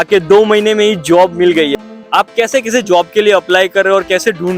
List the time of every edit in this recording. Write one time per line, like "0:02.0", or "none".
0:01.8

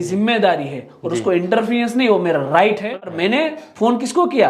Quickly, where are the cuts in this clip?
0:02.9

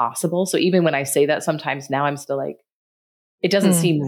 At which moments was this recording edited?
none

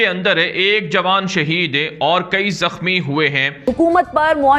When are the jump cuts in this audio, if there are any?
0:03.6

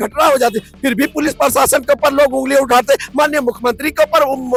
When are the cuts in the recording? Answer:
none

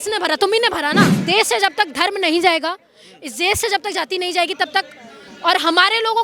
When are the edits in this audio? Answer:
0:01.2

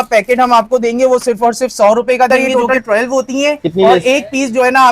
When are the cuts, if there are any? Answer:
0:02.3

